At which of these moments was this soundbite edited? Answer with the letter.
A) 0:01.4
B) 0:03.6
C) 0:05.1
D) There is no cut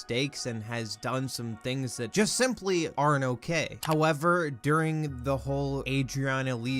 B